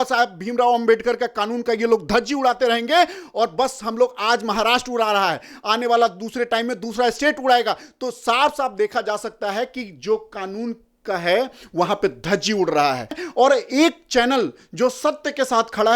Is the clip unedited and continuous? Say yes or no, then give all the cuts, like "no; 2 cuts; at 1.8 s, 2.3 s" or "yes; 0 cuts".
no; 1 cut; at 13.2 s